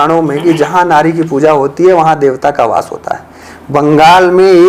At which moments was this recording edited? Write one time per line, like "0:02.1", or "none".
none